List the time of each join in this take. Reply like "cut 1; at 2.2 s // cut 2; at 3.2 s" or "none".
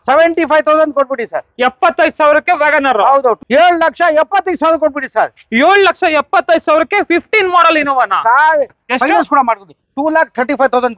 cut 1; at 3.4 s // cut 2; at 8.8 s

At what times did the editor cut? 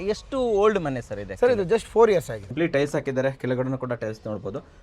cut 1; at 2.4 s

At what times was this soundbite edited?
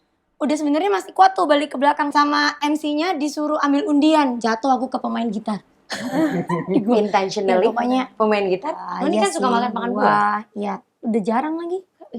cut 1; at 2.1 s // cut 2; at 8.8 s

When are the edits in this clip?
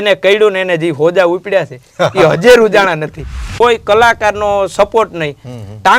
cut 1; at 3.5 s

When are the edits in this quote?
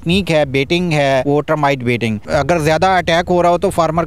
cut 1; at 1.2 s // cut 2; at 2.2 s

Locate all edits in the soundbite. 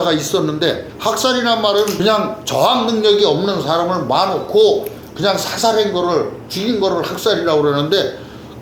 cut 1; at 1.0 s

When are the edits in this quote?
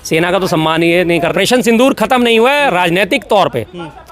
cut 1; at 1.3 s

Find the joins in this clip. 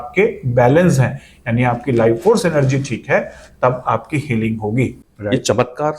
cut 1; at 5.0 s

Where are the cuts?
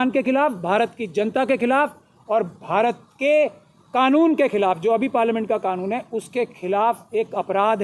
none

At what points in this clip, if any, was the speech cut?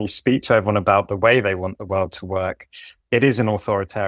cut 1; at 2.9 s

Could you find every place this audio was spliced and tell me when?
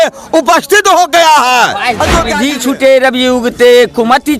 cut 1; at 2.3 s

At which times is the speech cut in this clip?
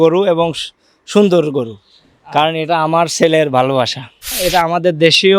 cut 1; at 4.3 s

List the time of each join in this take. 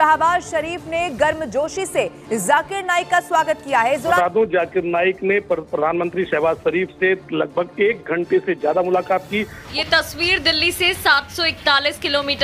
cut 1; at 4.2 s // cut 2; at 9.7 s

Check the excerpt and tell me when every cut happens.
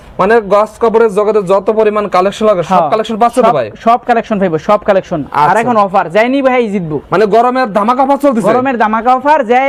none

